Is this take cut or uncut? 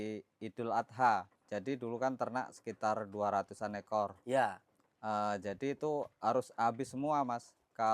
cut